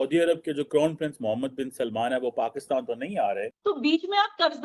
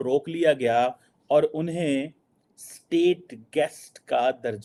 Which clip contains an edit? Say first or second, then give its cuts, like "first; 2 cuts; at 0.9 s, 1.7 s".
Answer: first; 1 cut; at 3.3 s